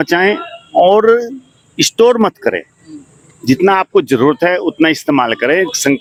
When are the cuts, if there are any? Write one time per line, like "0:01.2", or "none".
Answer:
none